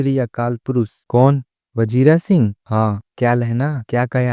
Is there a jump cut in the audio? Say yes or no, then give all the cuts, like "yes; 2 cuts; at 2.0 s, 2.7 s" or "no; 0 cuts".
yes; 1 cut; at 1.0 s